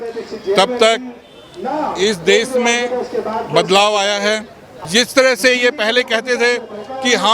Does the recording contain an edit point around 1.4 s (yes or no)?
no